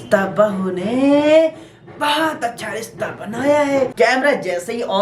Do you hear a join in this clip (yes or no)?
yes